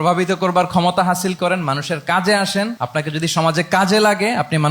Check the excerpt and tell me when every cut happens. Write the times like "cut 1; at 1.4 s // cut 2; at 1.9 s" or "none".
cut 1; at 2.8 s